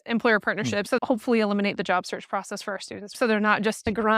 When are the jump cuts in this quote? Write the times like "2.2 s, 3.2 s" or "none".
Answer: 0.9 s, 3.2 s